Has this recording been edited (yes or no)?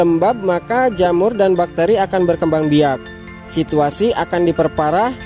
no